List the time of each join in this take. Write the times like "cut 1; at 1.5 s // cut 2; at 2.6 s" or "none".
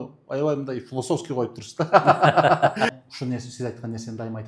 cut 1; at 2.9 s